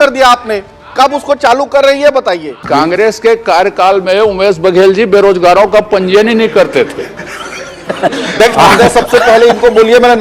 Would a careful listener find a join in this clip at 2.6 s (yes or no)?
yes